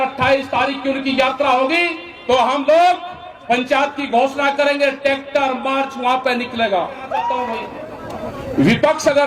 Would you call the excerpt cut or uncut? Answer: cut